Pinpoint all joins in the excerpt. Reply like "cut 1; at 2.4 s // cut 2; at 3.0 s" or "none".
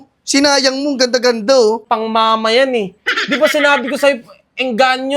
cut 1; at 1.8 s